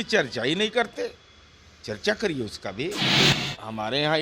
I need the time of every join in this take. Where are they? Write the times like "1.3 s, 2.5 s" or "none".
3.1 s